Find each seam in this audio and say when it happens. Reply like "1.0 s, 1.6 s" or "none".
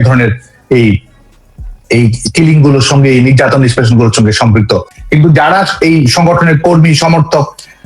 5.0 s